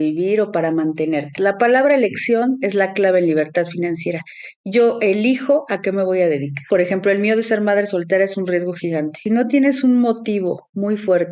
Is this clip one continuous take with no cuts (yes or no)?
no